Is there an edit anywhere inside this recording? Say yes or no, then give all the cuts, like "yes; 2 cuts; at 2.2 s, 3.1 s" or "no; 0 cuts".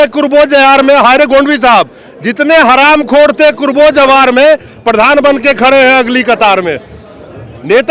no; 0 cuts